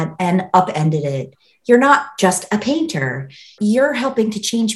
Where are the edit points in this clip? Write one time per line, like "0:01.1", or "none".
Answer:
0:03.5